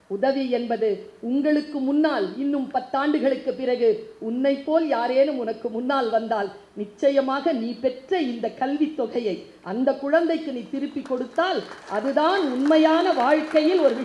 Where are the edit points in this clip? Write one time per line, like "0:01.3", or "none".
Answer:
none